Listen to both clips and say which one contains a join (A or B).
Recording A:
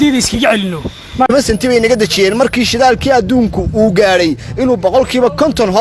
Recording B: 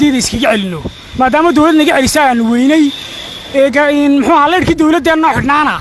A